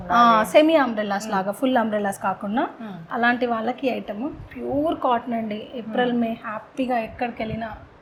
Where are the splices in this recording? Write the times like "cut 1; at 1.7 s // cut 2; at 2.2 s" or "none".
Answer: none